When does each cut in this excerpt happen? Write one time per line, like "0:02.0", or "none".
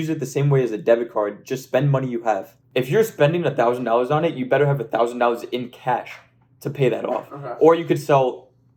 0:02.6

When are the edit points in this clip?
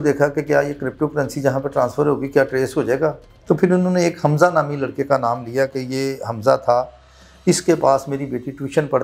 0:03.3

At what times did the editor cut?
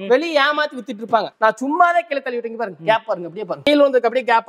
0:01.3
0:03.6

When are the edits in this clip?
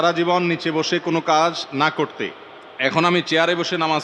none

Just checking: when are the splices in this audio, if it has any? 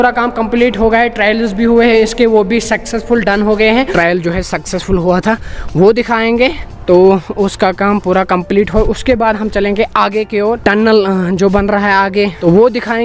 0:03.9

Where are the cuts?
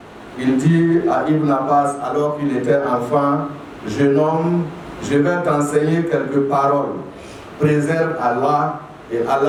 none

